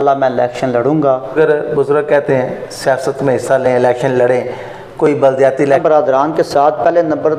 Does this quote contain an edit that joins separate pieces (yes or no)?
yes